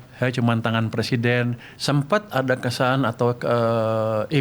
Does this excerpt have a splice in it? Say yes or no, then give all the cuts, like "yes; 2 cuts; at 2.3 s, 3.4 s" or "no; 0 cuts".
yes; 1 cut; at 1.7 s